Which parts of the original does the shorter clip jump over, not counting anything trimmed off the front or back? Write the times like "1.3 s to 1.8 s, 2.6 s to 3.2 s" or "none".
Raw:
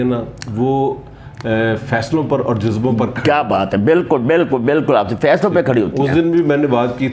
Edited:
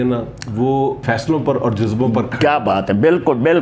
1.0 s to 1.8 s